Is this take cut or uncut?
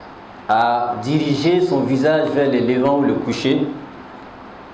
uncut